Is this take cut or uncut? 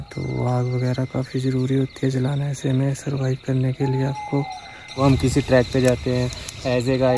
cut